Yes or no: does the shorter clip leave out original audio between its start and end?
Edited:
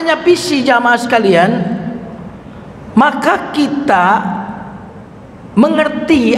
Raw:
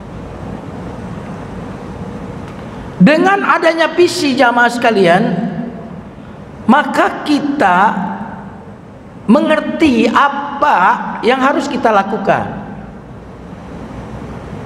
no